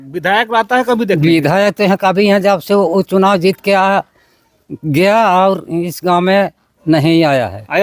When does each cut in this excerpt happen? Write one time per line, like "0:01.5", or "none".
none